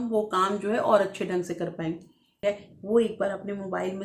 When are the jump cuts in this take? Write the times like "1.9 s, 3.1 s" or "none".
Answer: 2.4 s